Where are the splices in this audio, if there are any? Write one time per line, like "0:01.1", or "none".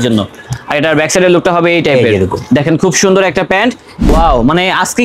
0:03.9